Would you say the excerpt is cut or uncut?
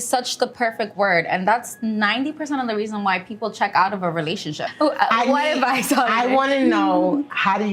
cut